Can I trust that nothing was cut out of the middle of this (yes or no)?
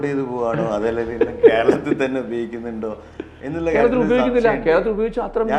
yes